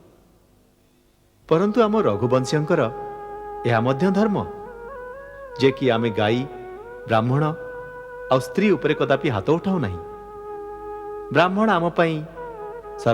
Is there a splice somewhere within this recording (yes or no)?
no